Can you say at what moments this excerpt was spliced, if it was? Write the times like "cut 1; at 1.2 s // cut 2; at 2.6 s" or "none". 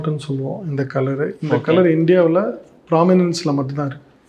none

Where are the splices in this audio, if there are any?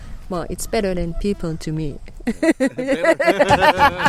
none

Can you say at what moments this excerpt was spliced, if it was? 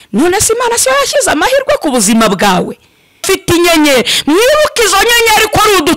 cut 1; at 3.2 s

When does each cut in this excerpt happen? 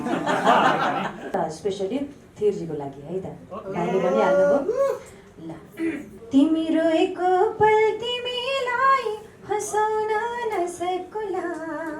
cut 1; at 1.3 s // cut 2; at 6.1 s

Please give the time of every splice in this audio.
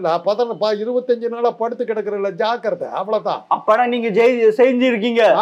none

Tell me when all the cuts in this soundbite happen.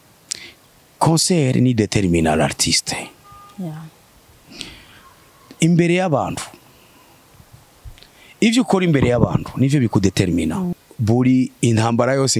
cut 1; at 10.8 s

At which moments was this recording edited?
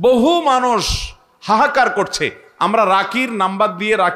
none

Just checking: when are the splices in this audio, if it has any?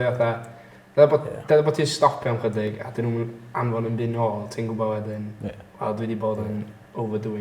none

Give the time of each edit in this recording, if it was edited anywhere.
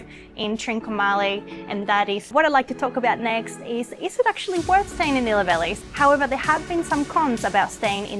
cut 1; at 2.2 s // cut 2; at 5.7 s

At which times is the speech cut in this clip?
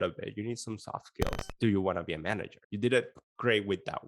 cut 1; at 1.5 s

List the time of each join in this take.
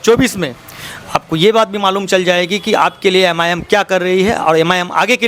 none

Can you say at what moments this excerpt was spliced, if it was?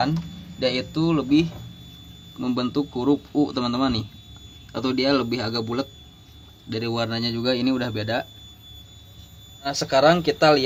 none

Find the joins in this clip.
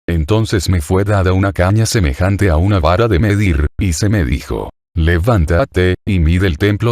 cut 1; at 1.6 s

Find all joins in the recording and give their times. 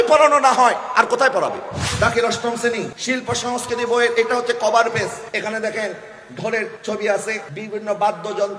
cut 1; at 1.8 s // cut 2; at 2.9 s // cut 3; at 5.2 s // cut 4; at 6.8 s // cut 5; at 7.5 s

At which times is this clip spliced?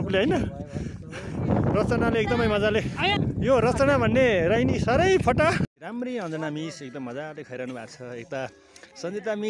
cut 1; at 1.4 s // cut 2; at 5.6 s

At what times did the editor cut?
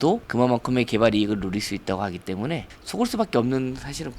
none

